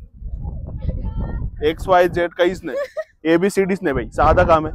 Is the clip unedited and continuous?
yes; 0 cuts

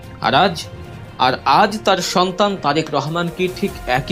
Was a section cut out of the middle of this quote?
no; 0 cuts

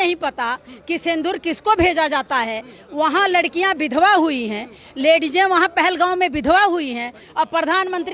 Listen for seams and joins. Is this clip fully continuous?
yes; 0 cuts

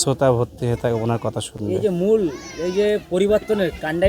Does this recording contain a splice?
no; 0 cuts

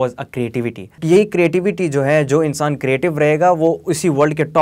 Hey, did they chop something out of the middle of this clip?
yes; 1 cut; at 1.0 s

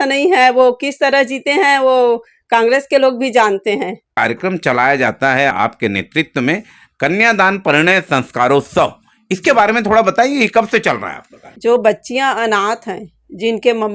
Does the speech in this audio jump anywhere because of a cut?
yes; 3 cuts; at 4.0 s, 5.5 s, 11.5 s

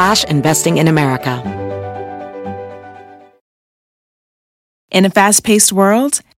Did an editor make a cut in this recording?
yes; 1 cut; at 1.4 s

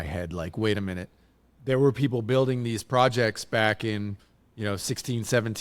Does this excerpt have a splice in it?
no; 0 cuts

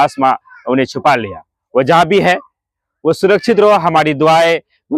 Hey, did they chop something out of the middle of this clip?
no; 0 cuts

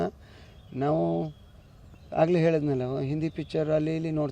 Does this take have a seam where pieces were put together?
yes; 1 cut; at 3.4 s

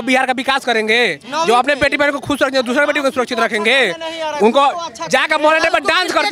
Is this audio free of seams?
yes; 0 cuts

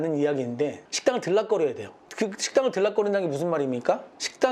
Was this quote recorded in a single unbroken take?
no; 1 cut; at 2.0 s

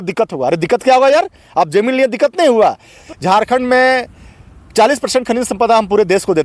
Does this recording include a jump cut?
yes; 1 cut; at 3.0 s

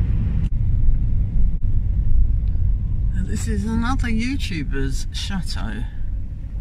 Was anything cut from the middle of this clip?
yes; 1 cut; at 1.6 s

